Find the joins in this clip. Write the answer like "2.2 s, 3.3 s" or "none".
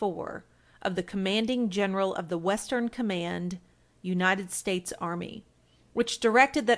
4.6 s